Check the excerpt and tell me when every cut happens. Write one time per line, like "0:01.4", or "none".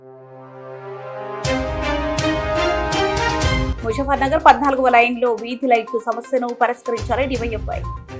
0:03.7